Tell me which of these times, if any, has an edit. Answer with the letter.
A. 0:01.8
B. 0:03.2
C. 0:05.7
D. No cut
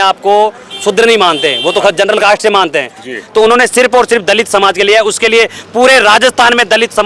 B